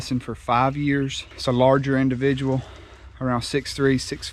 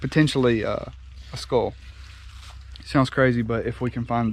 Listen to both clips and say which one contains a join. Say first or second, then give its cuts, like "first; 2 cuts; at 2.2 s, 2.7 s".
first; 1 cut; at 1.2 s